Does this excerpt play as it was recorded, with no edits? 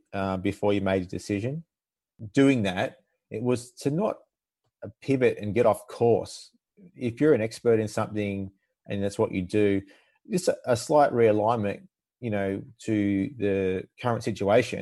no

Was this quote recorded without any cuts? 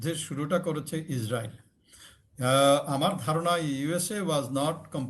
yes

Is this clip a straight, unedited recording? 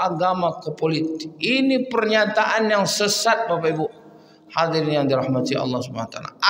yes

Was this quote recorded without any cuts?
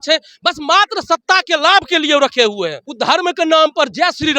no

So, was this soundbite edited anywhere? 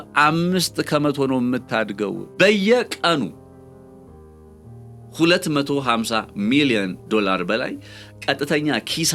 yes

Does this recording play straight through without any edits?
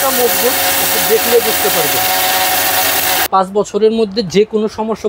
no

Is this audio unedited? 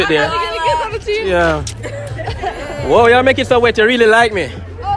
no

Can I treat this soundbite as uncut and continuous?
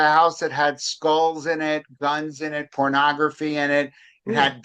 yes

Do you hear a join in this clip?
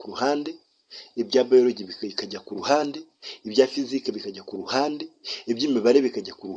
no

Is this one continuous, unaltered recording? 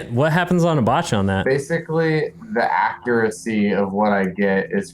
no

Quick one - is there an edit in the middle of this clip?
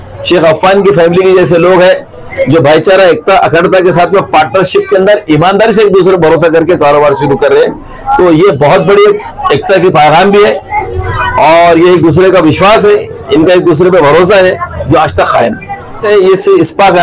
yes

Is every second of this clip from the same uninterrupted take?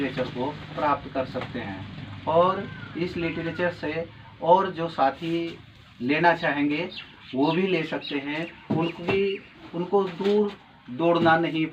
yes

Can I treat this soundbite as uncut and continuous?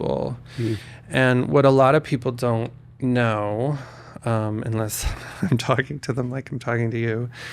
yes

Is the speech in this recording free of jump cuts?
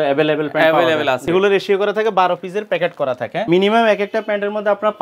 no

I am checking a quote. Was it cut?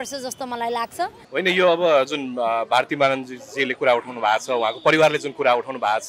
yes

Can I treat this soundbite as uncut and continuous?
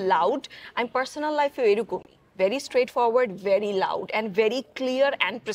yes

